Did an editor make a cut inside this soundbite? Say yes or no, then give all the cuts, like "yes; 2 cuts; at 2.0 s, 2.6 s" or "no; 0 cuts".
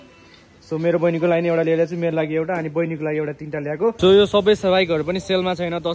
yes; 1 cut; at 4.0 s